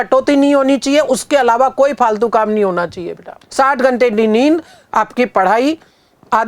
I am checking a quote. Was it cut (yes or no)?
no